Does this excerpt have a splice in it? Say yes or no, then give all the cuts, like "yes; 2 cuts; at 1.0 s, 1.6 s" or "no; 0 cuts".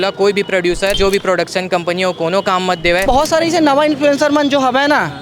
yes; 2 cuts; at 1.0 s, 3.0 s